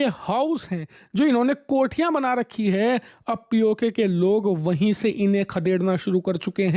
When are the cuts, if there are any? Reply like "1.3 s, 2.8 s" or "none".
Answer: none

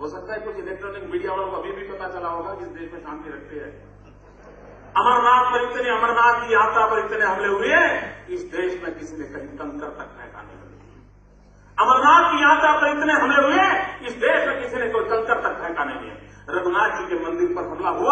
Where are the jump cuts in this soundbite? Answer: 12.6 s

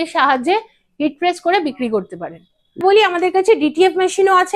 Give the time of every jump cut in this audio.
2.8 s

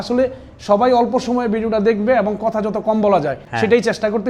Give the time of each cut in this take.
none

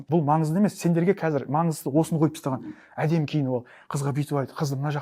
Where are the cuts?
none

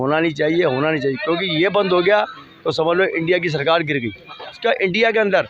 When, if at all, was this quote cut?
4.6 s

